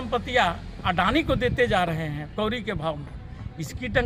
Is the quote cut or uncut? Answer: uncut